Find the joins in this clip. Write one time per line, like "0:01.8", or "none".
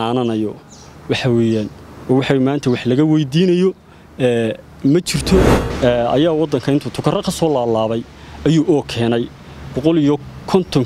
0:05.6